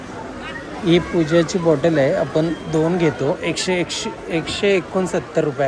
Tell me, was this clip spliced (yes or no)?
no